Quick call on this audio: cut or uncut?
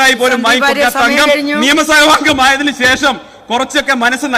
uncut